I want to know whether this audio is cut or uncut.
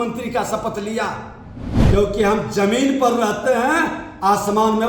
cut